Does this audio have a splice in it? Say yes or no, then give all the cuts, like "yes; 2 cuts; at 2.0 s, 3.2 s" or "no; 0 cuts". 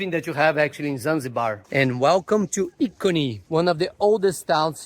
yes; 1 cut; at 1.6 s